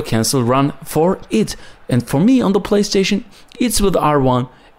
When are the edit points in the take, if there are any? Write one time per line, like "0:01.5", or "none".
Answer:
none